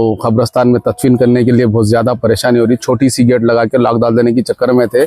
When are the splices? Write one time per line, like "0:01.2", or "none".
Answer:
none